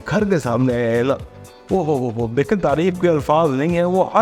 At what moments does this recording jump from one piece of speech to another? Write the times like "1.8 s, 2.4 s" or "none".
none